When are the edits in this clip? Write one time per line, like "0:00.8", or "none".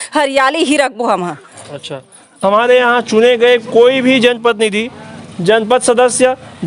0:02.3